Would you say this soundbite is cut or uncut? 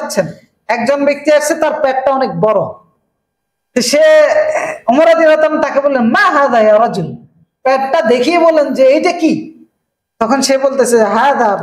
uncut